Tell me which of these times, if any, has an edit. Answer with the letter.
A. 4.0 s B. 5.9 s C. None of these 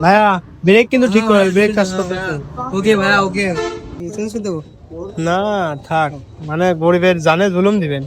A